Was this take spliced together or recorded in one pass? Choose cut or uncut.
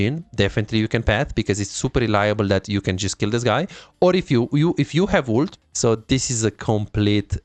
cut